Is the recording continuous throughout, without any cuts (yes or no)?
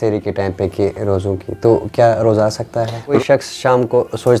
no